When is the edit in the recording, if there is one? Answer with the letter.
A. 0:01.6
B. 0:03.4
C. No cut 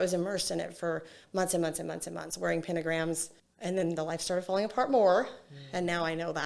B